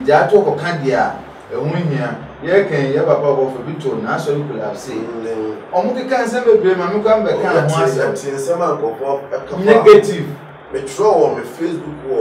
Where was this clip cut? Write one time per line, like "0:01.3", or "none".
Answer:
none